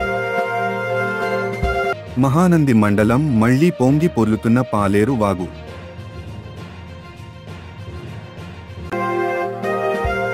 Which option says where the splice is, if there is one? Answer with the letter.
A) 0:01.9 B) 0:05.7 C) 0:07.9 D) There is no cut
A